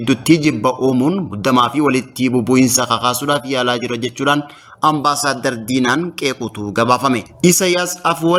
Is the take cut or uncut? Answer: uncut